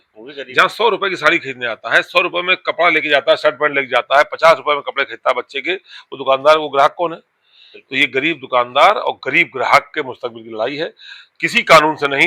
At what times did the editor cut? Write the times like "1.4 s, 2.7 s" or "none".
none